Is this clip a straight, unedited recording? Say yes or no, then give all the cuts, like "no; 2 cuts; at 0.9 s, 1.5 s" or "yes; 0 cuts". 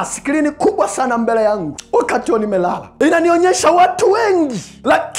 no; 2 cuts; at 1.7 s, 2.9 s